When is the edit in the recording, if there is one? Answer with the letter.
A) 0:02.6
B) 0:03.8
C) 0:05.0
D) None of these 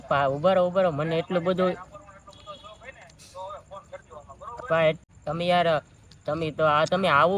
C